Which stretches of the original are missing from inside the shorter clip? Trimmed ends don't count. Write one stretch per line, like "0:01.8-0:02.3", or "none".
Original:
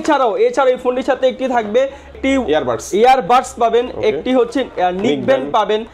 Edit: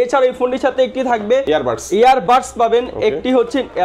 0:01.9-0:02.5